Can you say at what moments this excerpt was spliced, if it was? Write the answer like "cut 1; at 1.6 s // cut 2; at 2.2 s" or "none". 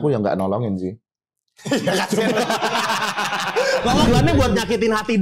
cut 1; at 4.1 s